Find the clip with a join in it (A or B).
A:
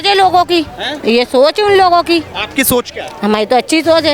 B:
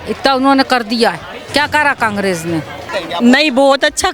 B